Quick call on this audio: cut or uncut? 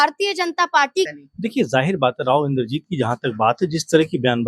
cut